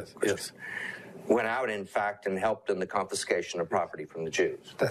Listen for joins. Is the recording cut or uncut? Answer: uncut